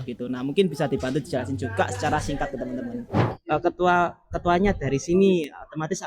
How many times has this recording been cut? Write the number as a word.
one